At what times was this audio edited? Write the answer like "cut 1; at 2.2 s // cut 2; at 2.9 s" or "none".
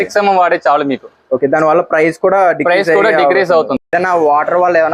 cut 1; at 3.8 s